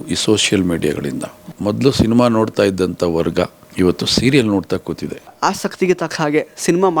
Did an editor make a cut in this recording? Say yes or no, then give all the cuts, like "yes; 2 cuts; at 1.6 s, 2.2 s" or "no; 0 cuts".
yes; 3 cuts; at 1.5 s, 3.6 s, 5.3 s